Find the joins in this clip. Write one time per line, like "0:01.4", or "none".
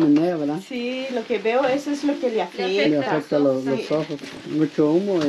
0:04.3